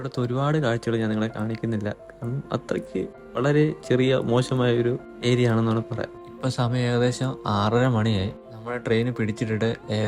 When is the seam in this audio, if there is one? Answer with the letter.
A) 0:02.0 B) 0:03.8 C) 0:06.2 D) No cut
C